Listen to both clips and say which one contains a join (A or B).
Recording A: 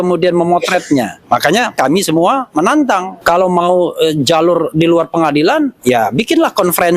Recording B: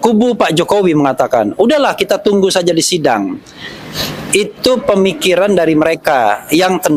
A